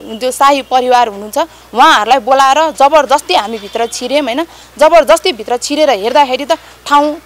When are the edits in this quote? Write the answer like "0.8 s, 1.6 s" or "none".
none